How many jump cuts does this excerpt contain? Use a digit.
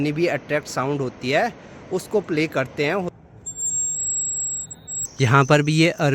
2